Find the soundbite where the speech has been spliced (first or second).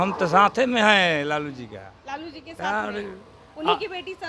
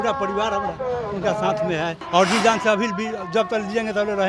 second